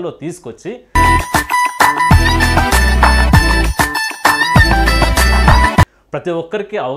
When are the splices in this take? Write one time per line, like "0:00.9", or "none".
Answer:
none